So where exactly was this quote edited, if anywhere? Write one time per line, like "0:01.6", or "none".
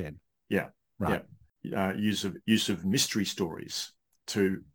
0:01.6